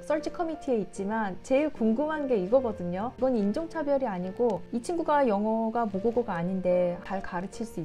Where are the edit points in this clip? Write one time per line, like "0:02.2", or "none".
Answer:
0:03.1
0:04.6
0:07.0